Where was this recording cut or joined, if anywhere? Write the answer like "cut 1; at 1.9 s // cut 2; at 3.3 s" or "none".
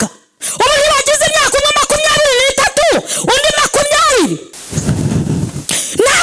cut 1; at 4.6 s